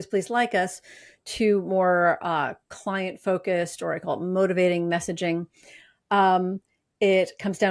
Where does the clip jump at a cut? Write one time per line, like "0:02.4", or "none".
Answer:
none